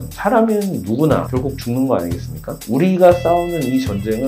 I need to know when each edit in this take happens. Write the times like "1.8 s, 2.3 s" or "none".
1.3 s, 2.6 s